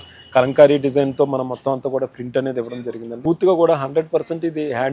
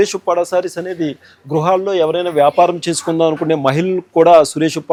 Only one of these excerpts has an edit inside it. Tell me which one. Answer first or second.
first